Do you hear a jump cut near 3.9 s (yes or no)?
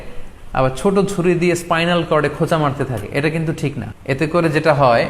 yes